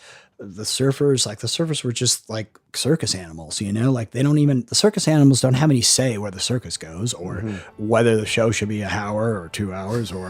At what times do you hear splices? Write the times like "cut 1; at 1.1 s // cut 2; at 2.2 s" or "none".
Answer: cut 1; at 2.6 s // cut 2; at 7.7 s